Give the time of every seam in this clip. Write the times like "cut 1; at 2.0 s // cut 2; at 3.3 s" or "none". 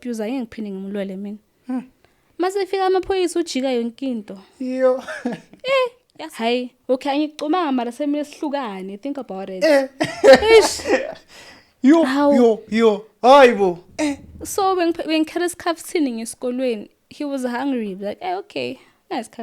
cut 1; at 6.0 s